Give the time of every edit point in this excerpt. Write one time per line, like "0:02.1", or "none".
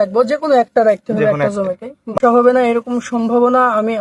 0:02.2